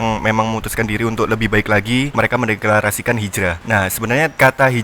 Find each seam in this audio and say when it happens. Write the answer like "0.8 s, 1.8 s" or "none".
2.1 s, 3.9 s

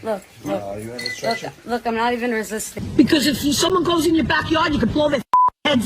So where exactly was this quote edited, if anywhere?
2.8 s

